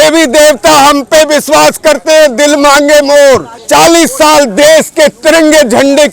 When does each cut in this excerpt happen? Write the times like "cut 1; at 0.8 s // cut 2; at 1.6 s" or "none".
cut 1; at 3.5 s